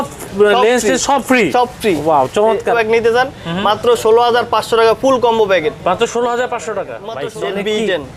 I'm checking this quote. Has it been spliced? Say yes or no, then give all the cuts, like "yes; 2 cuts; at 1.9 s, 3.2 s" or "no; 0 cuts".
yes; 2 cuts; at 2.8 s, 7.0 s